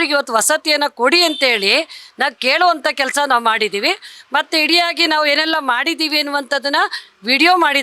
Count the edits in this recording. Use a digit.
0